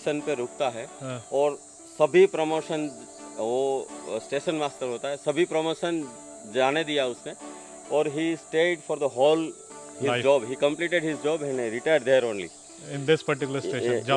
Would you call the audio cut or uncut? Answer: uncut